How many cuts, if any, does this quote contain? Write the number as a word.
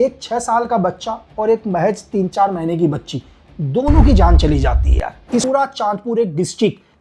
one